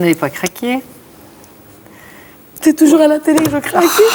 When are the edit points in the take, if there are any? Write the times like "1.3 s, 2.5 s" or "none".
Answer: none